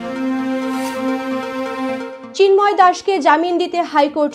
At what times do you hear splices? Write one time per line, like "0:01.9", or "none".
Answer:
0:02.2